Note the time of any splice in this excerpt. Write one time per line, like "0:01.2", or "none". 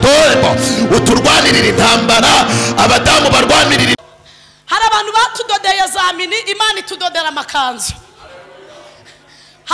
0:03.9